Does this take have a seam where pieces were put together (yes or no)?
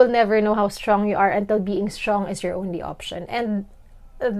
no